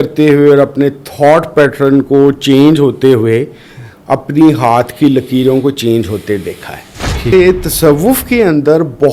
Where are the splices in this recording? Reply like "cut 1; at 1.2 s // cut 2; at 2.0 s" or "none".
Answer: cut 1; at 7.3 s